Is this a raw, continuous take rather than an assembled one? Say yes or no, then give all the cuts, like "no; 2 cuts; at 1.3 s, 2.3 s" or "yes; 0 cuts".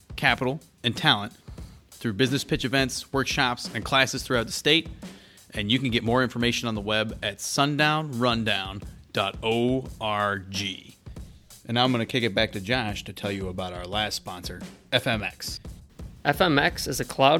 yes; 0 cuts